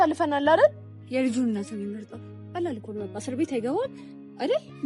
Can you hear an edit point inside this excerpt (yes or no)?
no